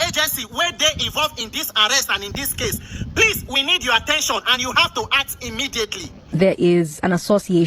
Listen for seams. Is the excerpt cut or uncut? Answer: cut